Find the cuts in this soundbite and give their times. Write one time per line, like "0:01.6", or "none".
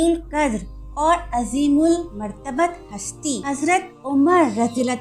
0:03.4